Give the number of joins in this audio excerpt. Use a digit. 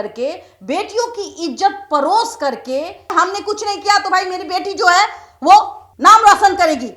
1